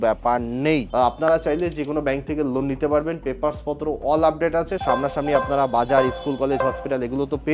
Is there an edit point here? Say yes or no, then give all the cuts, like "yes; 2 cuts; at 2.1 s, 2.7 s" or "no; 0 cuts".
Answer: yes; 2 cuts; at 0.9 s, 4.8 s